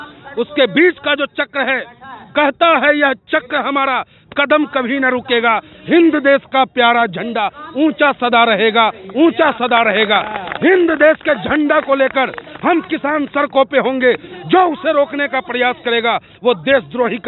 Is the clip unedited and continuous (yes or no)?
yes